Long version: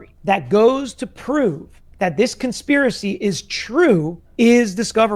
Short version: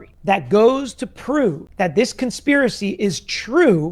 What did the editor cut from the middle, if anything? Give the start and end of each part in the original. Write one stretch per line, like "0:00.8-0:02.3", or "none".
0:01.7-0:01.9